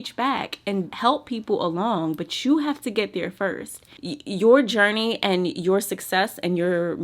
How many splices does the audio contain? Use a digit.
1